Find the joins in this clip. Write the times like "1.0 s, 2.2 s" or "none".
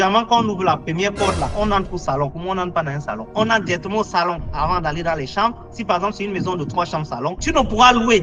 3.3 s